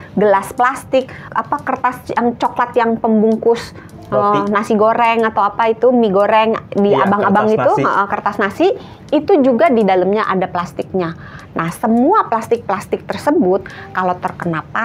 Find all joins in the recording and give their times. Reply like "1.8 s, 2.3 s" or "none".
none